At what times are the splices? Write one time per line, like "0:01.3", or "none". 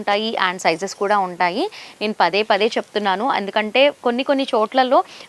none

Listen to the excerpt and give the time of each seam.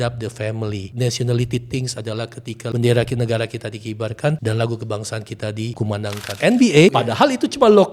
0:00.9
0:02.7
0:04.4
0:06.0
0:06.9

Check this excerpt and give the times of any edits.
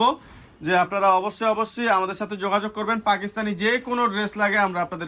none

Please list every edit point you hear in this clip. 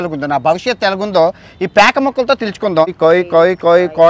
0:02.9

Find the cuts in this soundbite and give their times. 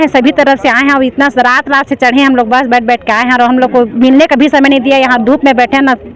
none

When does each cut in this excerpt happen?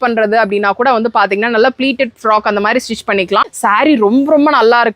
0:03.5

